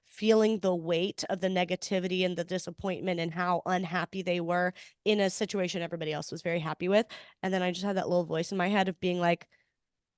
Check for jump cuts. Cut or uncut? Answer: uncut